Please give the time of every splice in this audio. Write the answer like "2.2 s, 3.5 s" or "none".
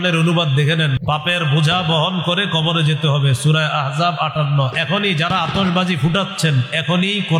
1.0 s